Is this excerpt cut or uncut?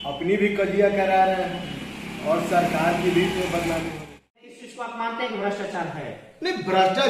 cut